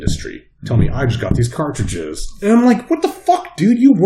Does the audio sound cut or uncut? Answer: uncut